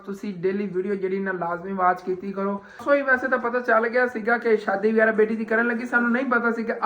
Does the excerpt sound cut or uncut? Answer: cut